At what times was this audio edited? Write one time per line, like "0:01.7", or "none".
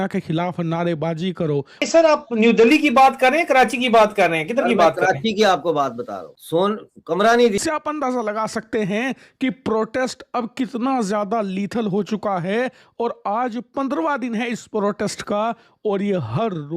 0:01.8
0:07.6